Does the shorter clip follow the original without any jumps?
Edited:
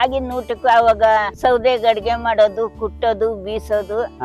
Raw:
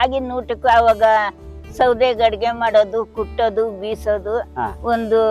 no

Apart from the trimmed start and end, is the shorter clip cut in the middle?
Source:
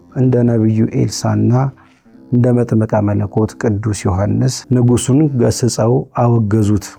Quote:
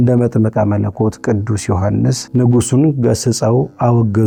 no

